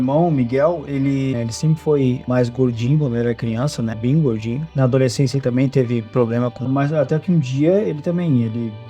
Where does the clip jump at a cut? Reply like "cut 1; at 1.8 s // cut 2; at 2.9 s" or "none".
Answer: cut 1; at 1.4 s // cut 2; at 6.7 s